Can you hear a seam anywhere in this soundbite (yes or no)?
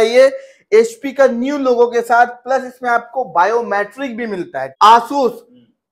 yes